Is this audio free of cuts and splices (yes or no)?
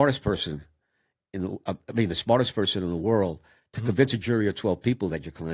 yes